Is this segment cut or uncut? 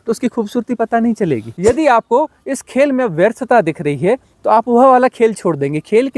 cut